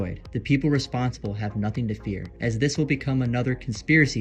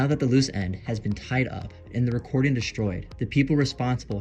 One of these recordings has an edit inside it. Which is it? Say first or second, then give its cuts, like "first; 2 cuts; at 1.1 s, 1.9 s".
first; 1 cut; at 2.3 s